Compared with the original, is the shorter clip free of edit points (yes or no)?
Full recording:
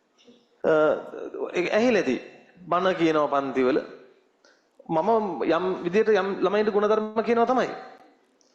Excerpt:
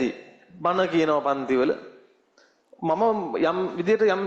yes